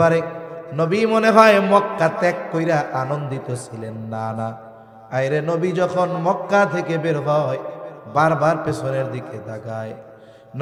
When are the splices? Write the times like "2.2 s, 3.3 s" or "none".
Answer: none